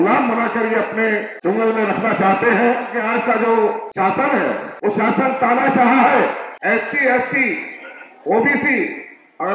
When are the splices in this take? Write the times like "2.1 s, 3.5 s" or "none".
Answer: 1.3 s, 2.9 s, 3.9 s, 4.7 s, 6.5 s